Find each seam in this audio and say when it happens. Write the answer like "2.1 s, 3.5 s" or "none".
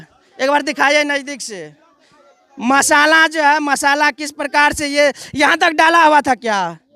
none